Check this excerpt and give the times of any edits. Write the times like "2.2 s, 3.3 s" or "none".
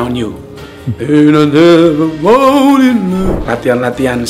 3.4 s